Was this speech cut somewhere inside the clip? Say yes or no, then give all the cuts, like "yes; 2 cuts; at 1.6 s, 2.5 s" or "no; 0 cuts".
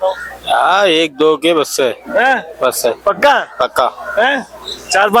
no; 0 cuts